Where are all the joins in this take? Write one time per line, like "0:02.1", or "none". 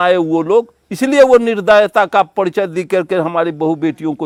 none